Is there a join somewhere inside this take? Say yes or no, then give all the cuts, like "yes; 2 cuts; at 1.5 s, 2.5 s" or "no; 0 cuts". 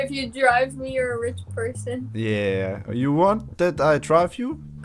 no; 0 cuts